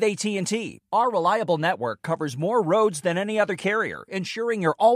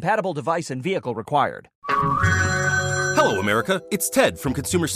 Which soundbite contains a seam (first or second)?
second